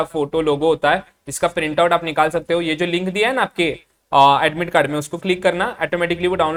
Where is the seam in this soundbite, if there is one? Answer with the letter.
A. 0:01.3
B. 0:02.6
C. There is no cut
C